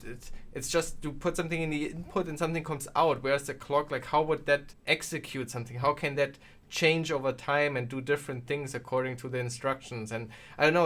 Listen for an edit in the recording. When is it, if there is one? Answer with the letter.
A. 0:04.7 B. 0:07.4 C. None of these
A